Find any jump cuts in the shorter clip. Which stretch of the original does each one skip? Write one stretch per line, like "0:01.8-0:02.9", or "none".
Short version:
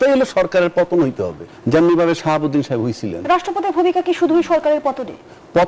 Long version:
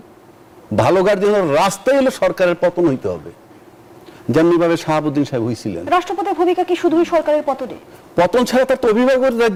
0:03.3-0:04.1